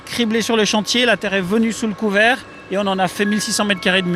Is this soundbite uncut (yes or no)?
yes